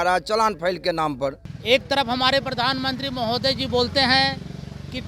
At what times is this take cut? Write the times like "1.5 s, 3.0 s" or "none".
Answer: 1.5 s